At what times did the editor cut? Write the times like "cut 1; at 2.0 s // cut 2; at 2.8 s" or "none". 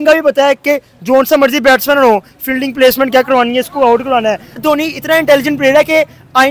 cut 1; at 4.6 s